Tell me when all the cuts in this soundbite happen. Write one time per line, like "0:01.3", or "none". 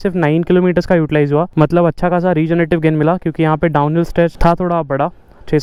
none